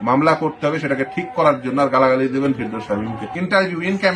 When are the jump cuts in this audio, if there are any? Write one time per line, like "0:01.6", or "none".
0:03.1

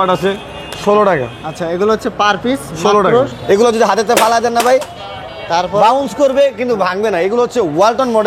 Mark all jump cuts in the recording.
0:03.3

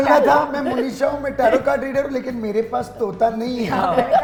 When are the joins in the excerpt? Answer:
none

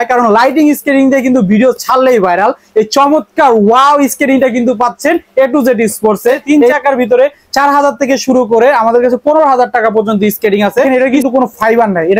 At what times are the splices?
0:06.4
0:10.9

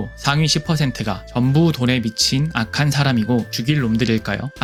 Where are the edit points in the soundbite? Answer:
none

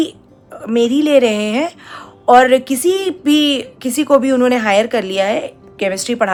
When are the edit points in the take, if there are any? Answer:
none

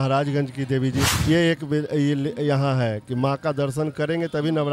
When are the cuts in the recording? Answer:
0:01.1

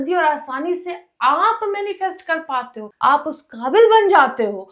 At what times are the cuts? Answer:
0:02.8

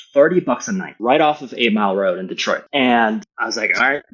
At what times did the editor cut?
0:00.9
0:02.6

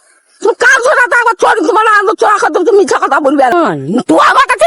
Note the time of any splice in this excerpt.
0:03.5

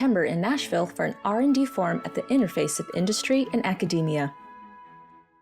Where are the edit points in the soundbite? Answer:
0:04.3

